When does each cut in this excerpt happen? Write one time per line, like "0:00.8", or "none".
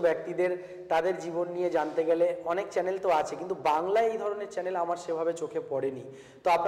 none